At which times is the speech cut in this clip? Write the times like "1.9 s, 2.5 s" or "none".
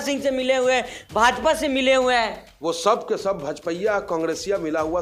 none